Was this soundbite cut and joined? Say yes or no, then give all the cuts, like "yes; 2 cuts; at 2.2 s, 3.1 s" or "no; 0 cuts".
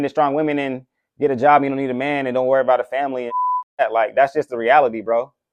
no; 0 cuts